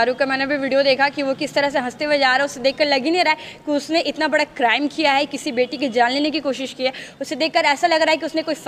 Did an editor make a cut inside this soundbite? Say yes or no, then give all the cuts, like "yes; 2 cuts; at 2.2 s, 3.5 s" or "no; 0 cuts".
no; 0 cuts